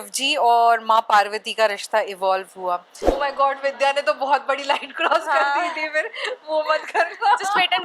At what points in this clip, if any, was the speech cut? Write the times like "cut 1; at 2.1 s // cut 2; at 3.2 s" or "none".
cut 1; at 3.0 s